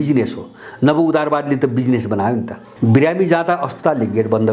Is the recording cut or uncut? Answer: cut